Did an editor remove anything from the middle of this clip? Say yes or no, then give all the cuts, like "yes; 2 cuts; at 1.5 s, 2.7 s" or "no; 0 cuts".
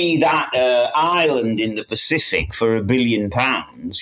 no; 0 cuts